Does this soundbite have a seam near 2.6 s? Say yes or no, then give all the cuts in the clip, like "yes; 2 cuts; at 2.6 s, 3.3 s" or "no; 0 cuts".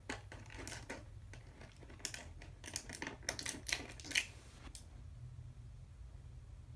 yes; 1 cut; at 2.6 s